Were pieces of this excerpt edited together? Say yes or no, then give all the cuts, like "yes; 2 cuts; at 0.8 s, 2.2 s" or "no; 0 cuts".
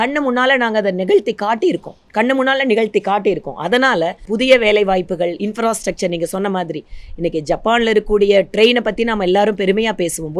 no; 0 cuts